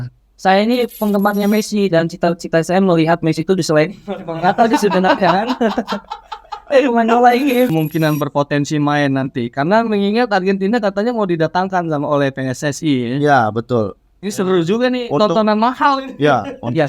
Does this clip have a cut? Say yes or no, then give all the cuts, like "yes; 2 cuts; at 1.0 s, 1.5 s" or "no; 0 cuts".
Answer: yes; 1 cut; at 7.7 s